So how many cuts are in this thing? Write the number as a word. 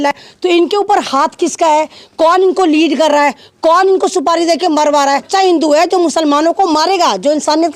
one